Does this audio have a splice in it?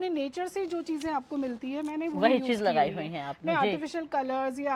no; 0 cuts

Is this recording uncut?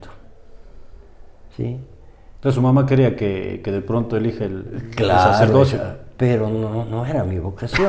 yes; 0 cuts

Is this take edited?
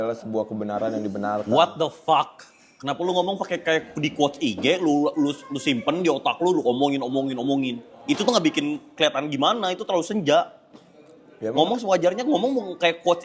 no; 0 cuts

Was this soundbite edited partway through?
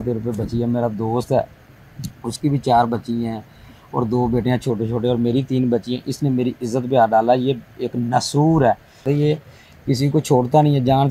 yes; 1 cut; at 9.0 s

